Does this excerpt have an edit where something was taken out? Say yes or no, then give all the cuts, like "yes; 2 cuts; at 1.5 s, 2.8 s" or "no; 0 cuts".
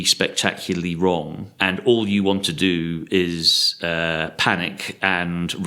yes; 1 cut; at 1.4 s